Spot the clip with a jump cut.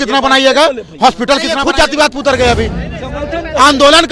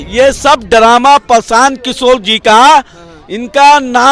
first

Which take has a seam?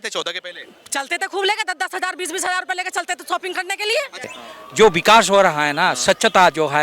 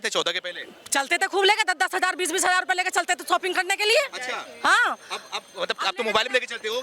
first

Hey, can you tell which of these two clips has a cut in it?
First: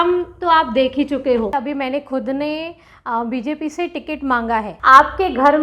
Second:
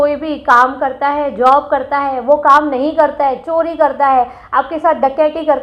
first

